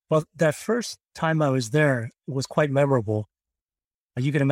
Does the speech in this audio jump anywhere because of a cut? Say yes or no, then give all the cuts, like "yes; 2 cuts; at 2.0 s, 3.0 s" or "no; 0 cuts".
no; 0 cuts